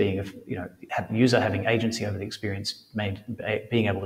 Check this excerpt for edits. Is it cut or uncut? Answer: uncut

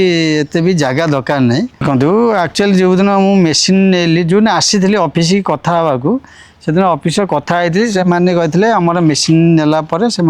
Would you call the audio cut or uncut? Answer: cut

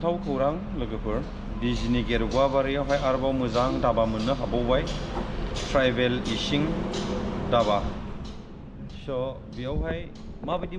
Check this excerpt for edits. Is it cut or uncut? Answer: uncut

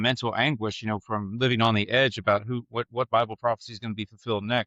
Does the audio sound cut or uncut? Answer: uncut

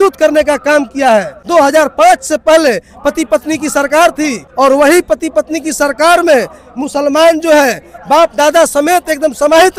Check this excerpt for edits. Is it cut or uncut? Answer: cut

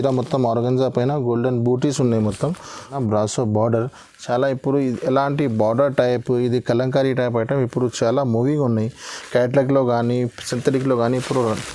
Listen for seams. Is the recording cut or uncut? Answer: cut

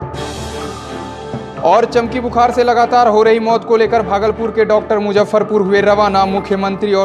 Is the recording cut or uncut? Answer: uncut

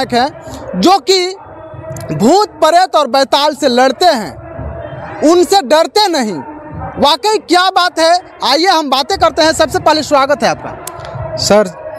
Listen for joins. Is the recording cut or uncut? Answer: uncut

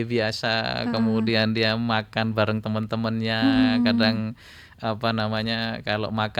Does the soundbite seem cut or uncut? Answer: uncut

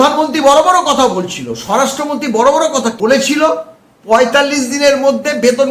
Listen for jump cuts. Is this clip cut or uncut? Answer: cut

